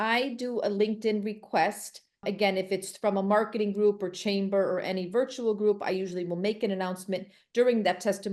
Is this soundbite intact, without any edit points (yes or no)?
yes